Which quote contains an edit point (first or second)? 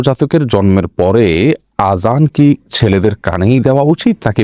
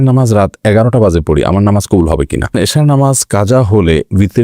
second